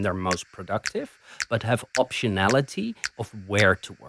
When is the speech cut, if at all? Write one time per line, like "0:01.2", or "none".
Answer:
0:03.1